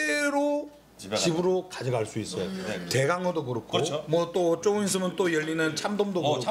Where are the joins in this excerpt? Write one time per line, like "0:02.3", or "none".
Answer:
none